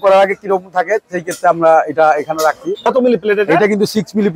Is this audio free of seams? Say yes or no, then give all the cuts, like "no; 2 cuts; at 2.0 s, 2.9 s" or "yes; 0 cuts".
no; 1 cut; at 2.9 s